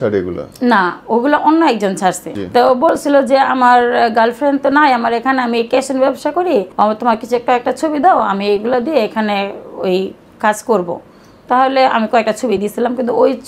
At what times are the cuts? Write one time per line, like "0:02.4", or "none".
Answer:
0:02.3
0:06.7